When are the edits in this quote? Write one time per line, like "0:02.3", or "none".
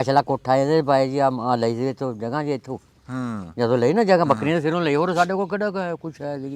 none